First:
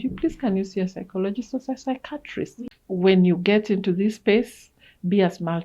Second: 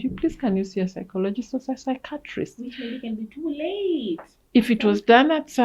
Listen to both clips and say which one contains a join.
first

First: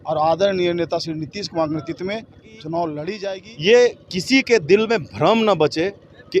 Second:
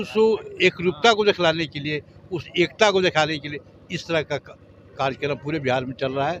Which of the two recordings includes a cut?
first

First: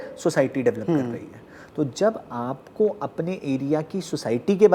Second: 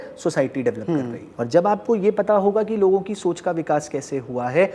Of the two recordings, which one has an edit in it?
second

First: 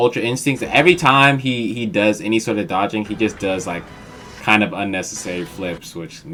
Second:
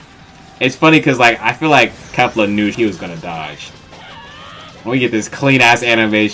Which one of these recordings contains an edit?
second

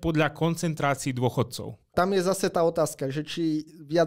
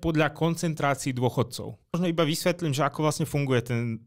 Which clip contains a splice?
first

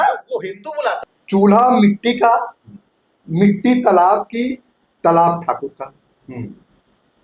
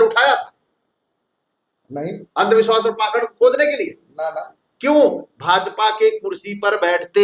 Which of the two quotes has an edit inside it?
first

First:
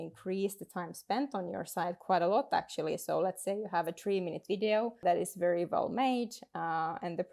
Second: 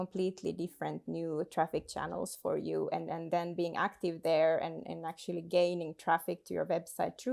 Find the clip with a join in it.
first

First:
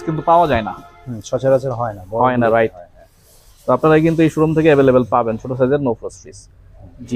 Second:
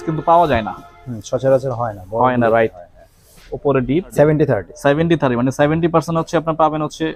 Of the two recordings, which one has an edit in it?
second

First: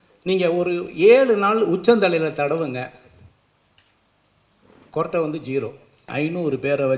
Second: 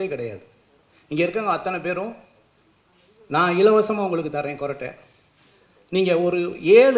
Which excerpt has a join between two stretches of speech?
first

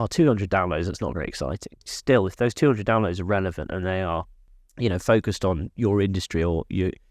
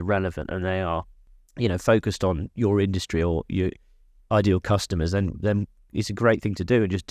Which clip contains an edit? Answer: first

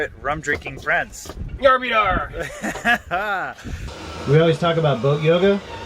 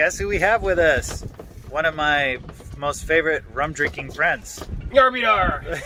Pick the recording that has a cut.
first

